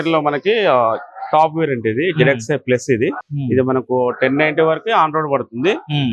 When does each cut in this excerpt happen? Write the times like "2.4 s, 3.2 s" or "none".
3.2 s